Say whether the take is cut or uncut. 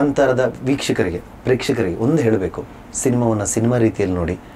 uncut